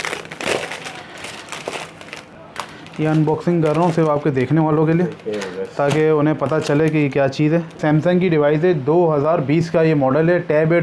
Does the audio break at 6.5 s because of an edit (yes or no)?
no